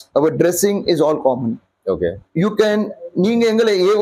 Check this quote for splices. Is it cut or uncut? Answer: uncut